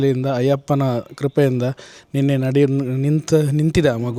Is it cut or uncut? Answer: uncut